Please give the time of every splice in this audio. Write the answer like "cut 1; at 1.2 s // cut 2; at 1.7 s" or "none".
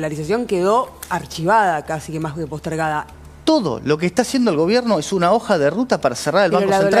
cut 1; at 3.1 s